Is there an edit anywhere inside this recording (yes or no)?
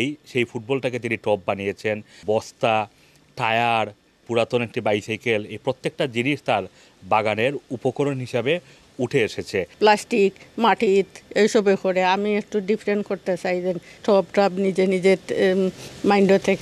yes